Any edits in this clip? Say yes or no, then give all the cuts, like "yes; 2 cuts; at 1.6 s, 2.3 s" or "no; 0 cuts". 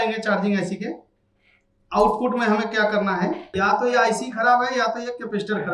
yes; 1 cut; at 3.5 s